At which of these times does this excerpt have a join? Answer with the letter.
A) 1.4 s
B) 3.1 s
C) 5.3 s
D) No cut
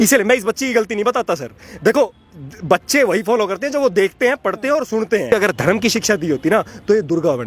C